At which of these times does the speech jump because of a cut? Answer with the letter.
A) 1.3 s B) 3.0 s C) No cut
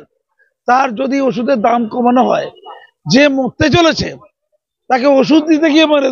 C